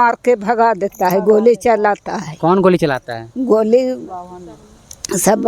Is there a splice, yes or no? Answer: no